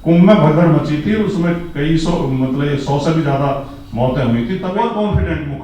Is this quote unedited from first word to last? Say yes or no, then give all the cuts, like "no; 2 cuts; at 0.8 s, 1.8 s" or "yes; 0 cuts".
no; 1 cut; at 4.7 s